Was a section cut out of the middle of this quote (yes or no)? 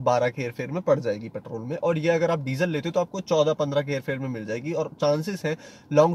no